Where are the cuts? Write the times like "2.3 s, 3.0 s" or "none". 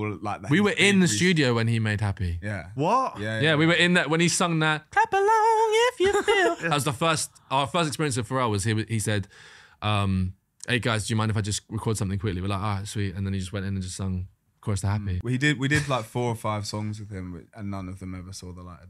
15.1 s

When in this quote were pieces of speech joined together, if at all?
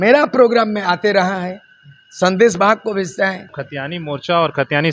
3.6 s

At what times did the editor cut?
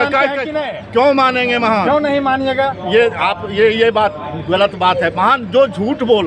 none

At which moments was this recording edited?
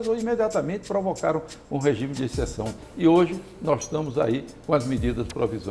2.8 s

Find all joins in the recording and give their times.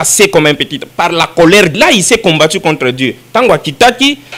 1.8 s

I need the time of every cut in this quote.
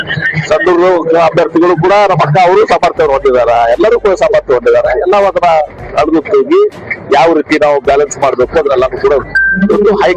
9.3 s

